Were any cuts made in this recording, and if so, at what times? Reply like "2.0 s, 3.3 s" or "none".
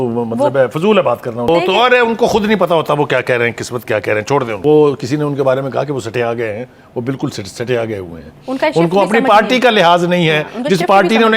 1.5 s, 4.5 s